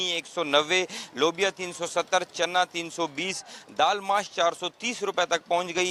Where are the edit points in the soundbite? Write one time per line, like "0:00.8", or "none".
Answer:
none